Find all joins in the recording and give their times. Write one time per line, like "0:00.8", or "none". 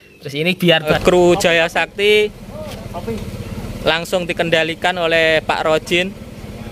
0:00.9